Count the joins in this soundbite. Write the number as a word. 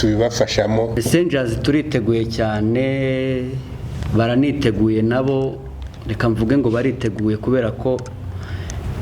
one